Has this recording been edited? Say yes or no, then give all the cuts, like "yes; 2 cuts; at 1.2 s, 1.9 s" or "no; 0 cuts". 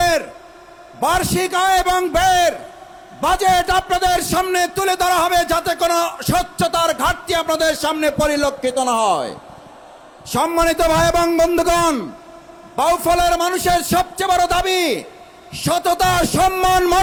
no; 0 cuts